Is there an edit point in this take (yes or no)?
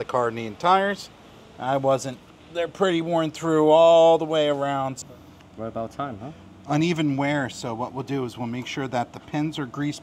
yes